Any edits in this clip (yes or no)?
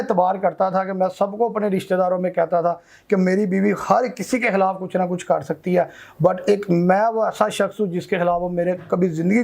no